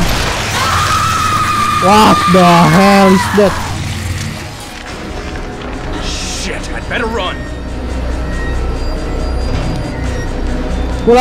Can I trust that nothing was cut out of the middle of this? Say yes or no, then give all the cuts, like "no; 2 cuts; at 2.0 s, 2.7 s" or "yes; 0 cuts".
yes; 0 cuts